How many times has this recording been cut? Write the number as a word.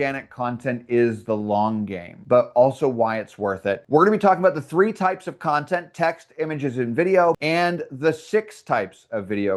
two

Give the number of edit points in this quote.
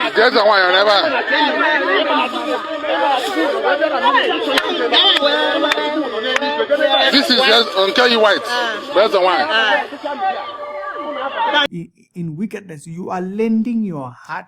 one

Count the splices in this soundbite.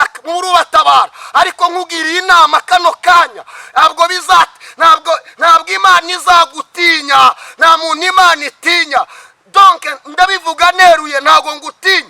one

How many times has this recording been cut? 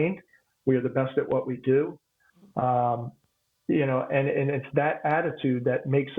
zero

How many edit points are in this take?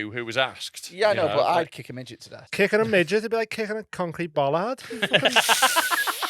one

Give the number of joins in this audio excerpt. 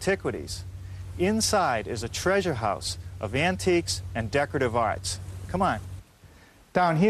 one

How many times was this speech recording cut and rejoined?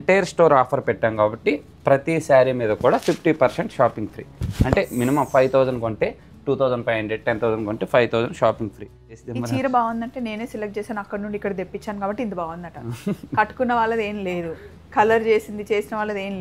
one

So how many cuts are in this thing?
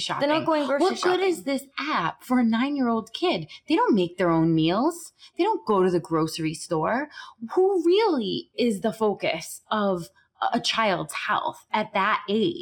zero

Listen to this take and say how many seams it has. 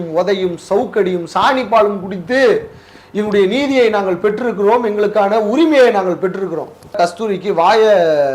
one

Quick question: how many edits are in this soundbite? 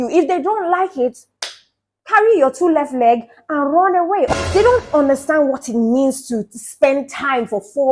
one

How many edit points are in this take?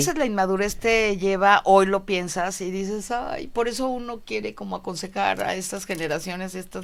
zero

